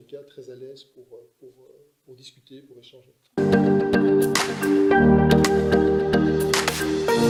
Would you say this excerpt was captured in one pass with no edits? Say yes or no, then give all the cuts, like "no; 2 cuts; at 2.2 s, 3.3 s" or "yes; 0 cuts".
yes; 0 cuts